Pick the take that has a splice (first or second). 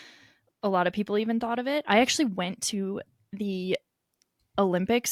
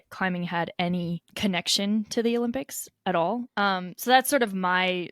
second